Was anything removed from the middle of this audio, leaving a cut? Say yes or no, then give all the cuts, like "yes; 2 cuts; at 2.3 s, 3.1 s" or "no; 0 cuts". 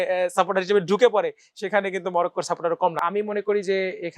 yes; 1 cut; at 3.0 s